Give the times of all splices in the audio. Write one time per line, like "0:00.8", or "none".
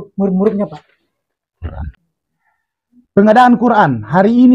0:01.8